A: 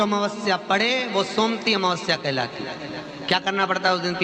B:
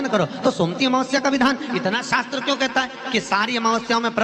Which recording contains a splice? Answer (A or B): B